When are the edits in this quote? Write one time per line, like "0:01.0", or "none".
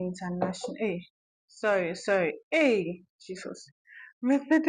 0:01.1